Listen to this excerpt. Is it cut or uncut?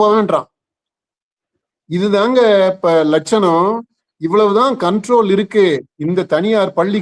uncut